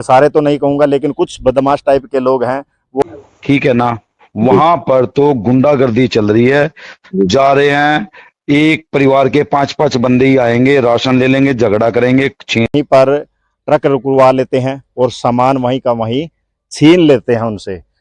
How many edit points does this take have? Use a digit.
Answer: 2